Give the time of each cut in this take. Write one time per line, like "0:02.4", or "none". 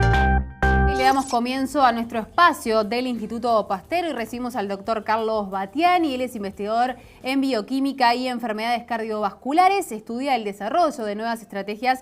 0:00.9